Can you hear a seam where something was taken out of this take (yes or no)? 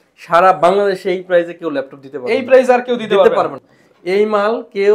yes